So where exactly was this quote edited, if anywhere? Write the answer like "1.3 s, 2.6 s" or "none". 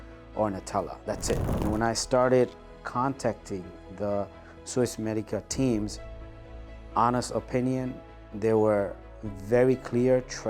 1.6 s

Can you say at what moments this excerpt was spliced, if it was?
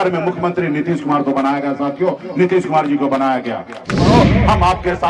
4.0 s

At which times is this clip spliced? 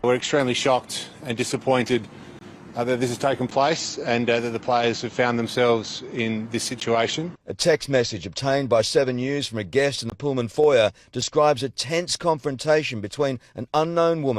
none

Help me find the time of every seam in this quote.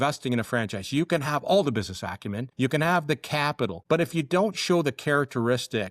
2.4 s, 3.8 s

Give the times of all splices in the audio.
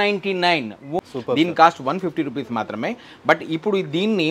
1.0 s

